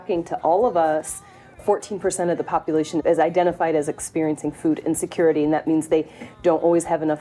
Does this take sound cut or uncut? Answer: uncut